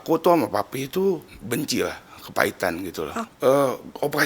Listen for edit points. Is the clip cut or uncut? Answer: cut